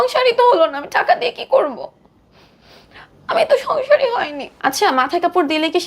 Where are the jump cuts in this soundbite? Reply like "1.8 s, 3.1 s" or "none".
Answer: 4.4 s